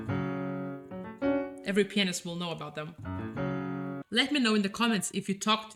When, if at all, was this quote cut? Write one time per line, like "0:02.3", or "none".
none

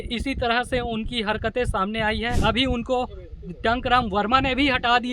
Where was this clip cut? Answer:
0:02.3

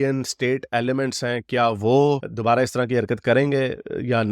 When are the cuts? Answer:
none

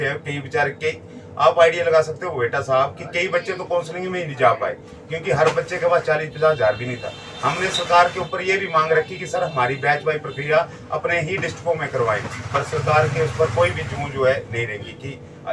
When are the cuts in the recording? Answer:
none

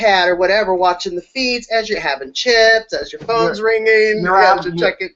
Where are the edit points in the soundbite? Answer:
none

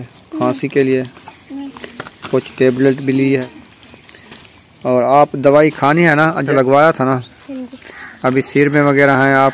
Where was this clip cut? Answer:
0:03.4
0:06.5

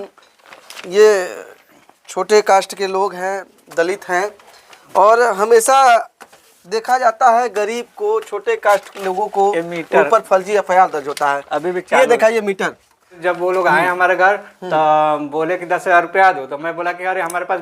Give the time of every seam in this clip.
0:13.2

